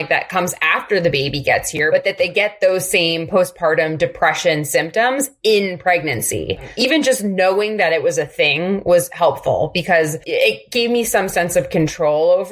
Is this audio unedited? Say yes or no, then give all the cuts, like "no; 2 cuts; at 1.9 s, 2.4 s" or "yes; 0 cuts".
no; 3 cuts; at 1.9 s, 6.7 s, 10.2 s